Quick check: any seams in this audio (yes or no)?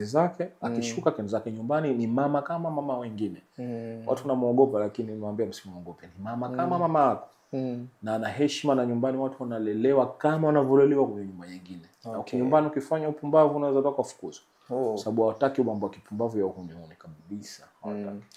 no